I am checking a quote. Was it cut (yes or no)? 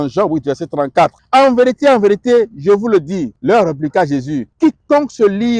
yes